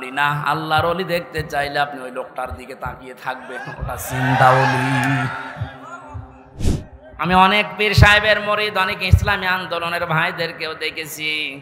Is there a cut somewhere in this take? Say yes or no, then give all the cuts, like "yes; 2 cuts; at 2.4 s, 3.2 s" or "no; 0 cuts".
yes; 1 cut; at 6.7 s